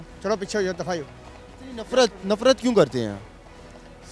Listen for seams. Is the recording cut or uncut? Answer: uncut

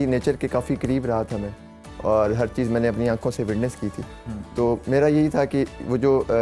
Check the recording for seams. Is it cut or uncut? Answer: uncut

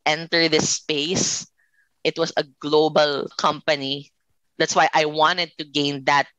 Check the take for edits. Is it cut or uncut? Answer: cut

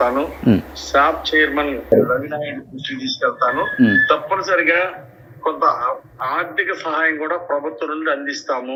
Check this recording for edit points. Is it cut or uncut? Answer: uncut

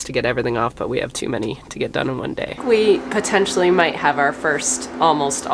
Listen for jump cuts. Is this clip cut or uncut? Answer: cut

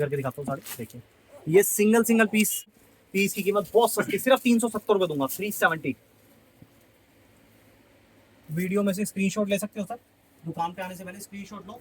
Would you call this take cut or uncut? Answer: cut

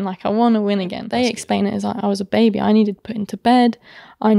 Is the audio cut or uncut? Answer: cut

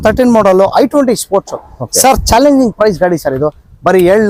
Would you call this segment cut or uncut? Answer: uncut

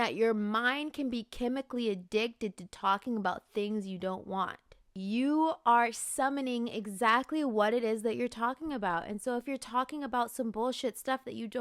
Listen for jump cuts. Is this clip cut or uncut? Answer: cut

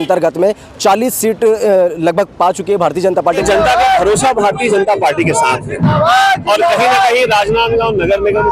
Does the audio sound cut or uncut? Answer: cut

